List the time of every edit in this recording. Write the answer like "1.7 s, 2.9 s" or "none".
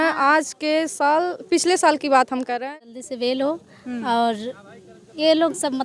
2.7 s